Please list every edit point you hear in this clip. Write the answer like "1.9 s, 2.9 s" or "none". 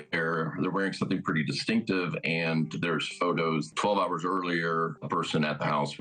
3.7 s, 5.0 s